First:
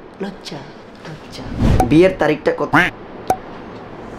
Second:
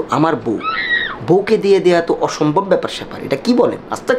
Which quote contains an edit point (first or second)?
first